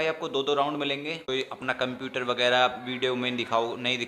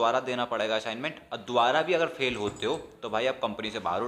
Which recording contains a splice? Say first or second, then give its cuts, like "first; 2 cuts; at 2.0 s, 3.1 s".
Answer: first; 1 cut; at 1.2 s